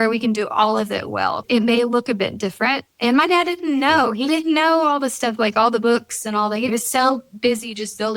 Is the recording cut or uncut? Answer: cut